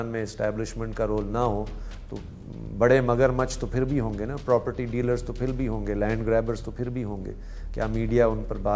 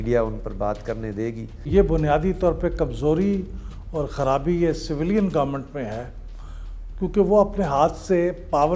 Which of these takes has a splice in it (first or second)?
second